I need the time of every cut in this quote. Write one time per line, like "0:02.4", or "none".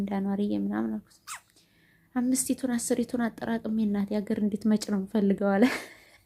none